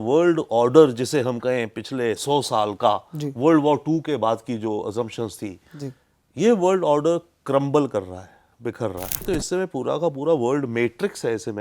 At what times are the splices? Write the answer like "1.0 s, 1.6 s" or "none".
9.2 s